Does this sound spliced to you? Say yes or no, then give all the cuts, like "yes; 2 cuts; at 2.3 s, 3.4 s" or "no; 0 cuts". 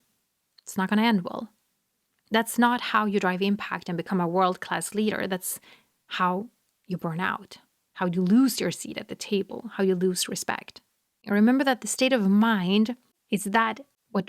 yes; 1 cut; at 11.2 s